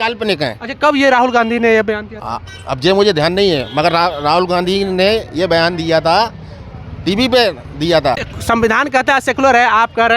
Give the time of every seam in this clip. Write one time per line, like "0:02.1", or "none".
0:08.3